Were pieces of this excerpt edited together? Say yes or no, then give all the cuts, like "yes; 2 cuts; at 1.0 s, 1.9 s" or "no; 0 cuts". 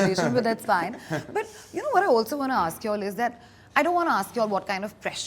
no; 0 cuts